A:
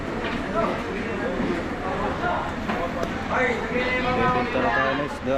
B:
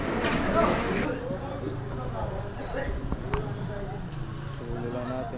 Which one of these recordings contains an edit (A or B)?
B